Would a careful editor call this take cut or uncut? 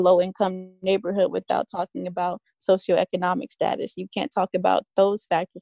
uncut